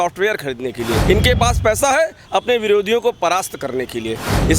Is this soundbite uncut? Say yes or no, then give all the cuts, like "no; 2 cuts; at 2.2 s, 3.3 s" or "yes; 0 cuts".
no; 1 cut; at 1.0 s